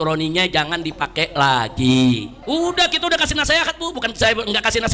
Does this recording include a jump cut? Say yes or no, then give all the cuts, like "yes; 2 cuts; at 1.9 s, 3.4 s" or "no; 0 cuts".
yes; 1 cut; at 2.3 s